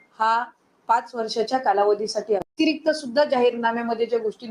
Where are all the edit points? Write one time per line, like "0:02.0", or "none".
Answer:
0:02.5

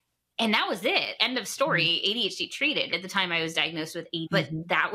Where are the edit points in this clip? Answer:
0:01.2
0:02.9

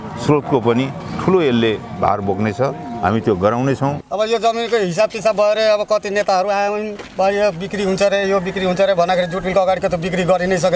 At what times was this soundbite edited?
0:04.0

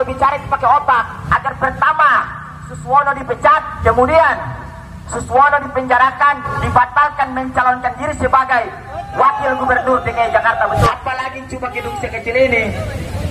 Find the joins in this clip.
0:01.2
0:03.7
0:06.5
0:10.8

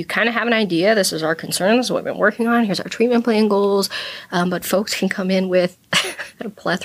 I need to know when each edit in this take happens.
none

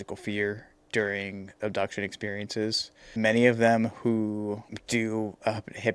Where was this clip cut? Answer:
0:01.5
0:03.1
0:04.7

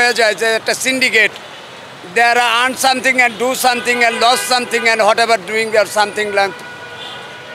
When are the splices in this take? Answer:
none

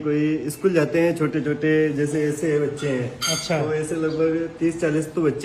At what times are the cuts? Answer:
none

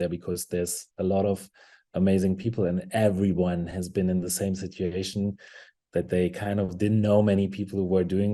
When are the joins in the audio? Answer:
none

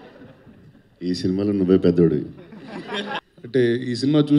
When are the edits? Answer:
0:03.3

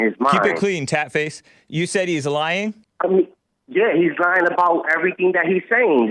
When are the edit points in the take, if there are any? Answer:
0:02.9

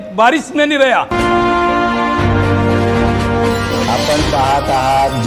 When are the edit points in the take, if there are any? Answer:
0:01.2

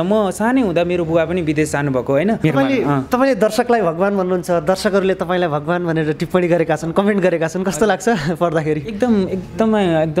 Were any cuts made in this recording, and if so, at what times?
0:02.4

